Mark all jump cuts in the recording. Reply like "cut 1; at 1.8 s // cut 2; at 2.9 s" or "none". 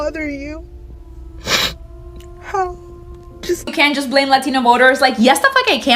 cut 1; at 3.7 s